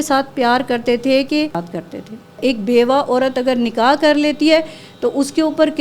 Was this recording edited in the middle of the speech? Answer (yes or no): yes